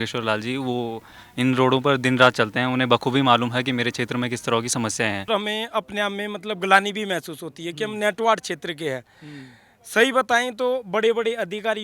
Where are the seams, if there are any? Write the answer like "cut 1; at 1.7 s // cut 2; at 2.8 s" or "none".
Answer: cut 1; at 5.3 s